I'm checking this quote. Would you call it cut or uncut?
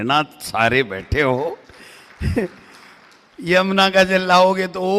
uncut